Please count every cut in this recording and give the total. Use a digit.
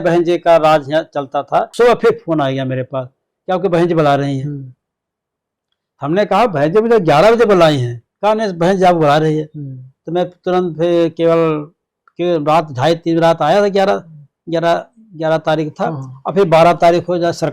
1